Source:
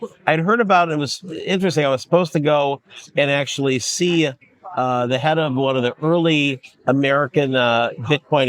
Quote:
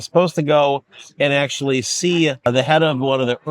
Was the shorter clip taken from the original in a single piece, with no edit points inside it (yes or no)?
no